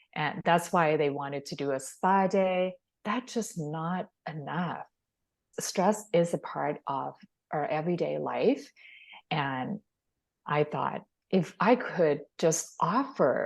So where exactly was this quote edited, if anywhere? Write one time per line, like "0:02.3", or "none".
0:02.9